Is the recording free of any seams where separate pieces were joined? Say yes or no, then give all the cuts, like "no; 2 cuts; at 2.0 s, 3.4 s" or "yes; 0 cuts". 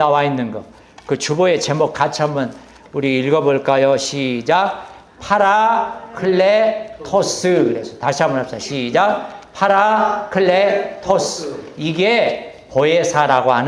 yes; 0 cuts